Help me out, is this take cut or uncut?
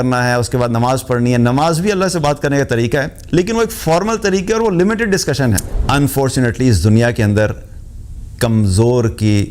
cut